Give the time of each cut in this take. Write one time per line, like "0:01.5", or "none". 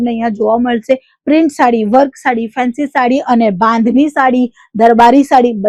none